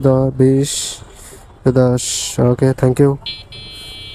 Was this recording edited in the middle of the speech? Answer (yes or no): no